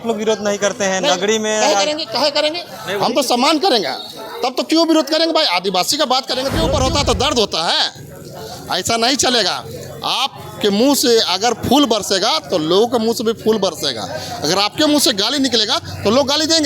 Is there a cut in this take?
yes; 1 cut; at 6.6 s

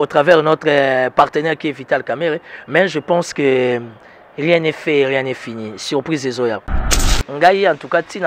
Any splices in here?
yes; 1 cut; at 6.7 s

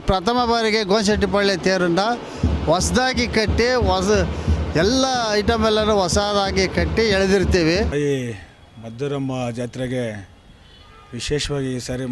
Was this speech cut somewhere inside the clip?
yes; 1 cut; at 7.9 s

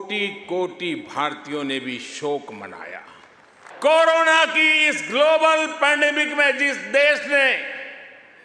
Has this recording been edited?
yes; 1 cut; at 3.4 s

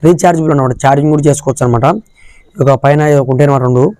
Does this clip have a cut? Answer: no; 0 cuts

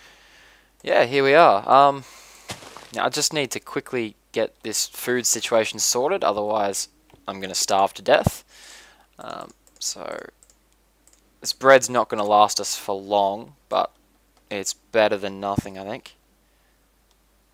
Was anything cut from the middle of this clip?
no; 0 cuts

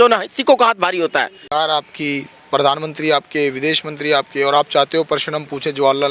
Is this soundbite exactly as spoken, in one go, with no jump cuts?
no; 1 cut; at 1.5 s

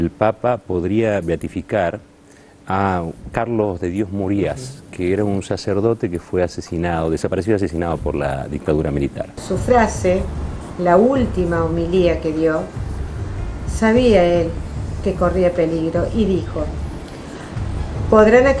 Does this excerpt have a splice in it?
yes; 1 cut; at 9.3 s

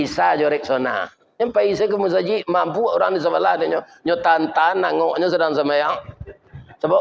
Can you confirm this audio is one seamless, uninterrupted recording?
no; 1 cut; at 1.2 s

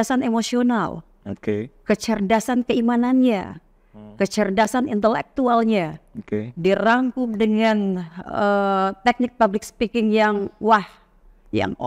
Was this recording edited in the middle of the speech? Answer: no; 0 cuts

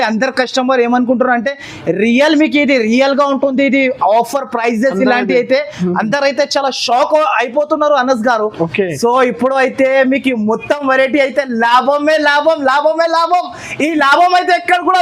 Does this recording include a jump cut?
no; 0 cuts

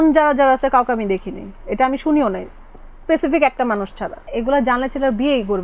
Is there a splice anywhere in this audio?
yes; 1 cut; at 4.3 s

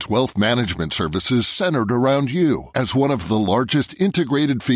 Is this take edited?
no; 0 cuts

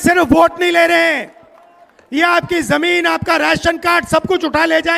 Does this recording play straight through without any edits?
yes; 0 cuts

